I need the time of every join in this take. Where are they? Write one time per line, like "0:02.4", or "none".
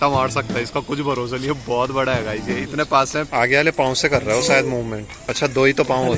0:03.3
0:05.2